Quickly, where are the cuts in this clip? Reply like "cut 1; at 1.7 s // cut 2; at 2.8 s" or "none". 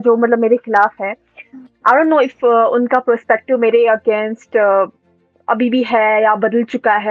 none